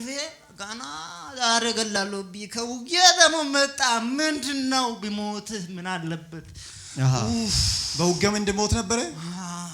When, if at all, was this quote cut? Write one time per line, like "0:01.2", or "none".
none